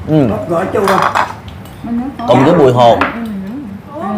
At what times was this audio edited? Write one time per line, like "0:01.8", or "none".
none